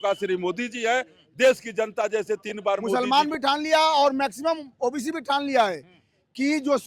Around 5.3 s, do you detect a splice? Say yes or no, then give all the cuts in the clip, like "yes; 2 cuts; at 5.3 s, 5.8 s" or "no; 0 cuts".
no; 1 cut; at 2.9 s